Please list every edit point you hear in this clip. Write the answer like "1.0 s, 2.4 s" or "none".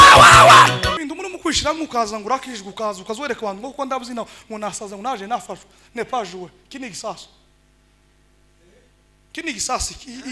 0.9 s